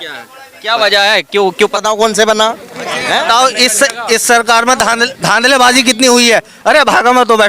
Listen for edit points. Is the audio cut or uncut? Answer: cut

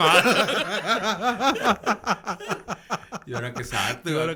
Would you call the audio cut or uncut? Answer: uncut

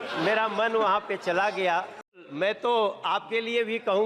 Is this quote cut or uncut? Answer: cut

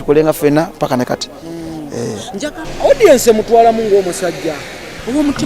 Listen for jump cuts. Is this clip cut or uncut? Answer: cut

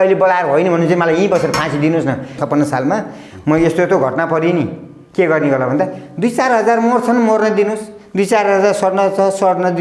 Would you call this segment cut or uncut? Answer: cut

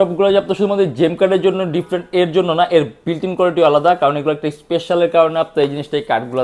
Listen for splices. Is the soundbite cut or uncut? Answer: uncut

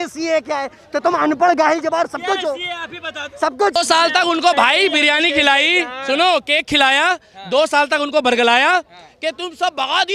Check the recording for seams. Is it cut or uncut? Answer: cut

